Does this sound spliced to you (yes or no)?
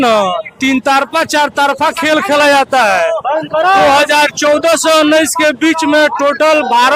no